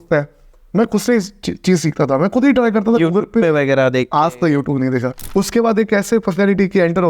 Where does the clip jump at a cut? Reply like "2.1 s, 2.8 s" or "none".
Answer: 5.2 s

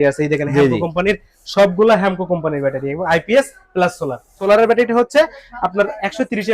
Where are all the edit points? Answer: 4.4 s

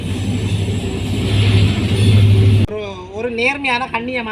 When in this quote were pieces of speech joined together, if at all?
2.6 s

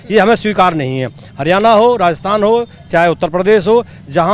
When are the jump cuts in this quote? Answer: none

